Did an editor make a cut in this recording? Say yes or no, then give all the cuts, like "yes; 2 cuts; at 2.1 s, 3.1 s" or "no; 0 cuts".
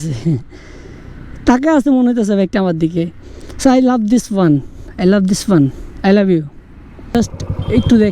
yes; 1 cut; at 7.1 s